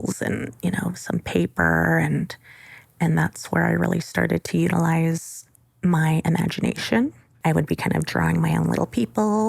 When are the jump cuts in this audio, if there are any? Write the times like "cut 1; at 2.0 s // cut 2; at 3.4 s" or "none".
cut 1; at 7.3 s